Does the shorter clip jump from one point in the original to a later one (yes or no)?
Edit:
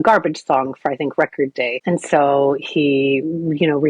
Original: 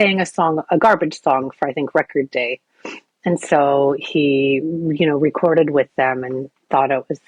yes